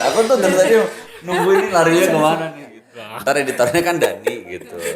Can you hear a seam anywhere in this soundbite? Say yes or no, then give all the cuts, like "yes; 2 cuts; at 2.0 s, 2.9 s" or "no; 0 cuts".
yes; 1 cut; at 2.9 s